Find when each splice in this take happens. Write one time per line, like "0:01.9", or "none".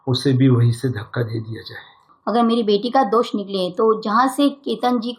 0:02.1